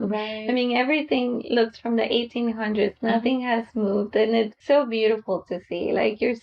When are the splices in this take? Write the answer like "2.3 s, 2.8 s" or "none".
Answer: 4.6 s